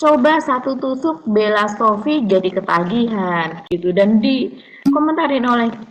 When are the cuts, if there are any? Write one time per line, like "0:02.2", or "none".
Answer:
none